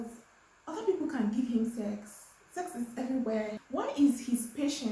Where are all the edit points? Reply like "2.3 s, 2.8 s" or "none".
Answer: 3.6 s